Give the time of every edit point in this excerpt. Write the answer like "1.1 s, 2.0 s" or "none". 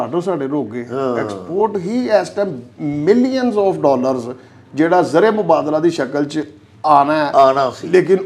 none